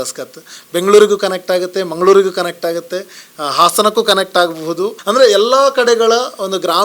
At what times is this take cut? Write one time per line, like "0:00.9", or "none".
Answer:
0:05.0